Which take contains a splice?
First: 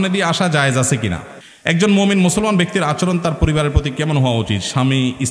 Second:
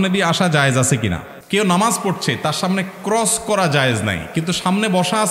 first; 1 cut; at 1.3 s

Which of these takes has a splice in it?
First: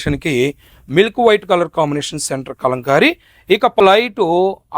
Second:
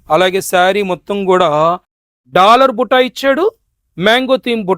first; 1 cut; at 3.8 s

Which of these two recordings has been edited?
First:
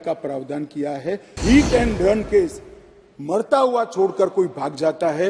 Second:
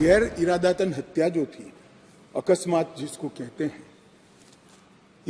first; 1 cut; at 1.4 s

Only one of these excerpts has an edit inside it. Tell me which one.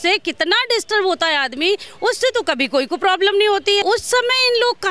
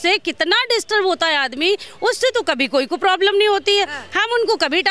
first; 1 cut; at 3.8 s

